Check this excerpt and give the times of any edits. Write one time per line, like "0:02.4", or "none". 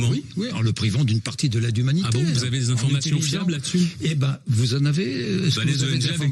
none